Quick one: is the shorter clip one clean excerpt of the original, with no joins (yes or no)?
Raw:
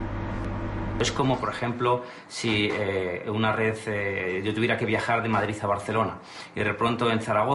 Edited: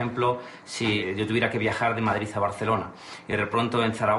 no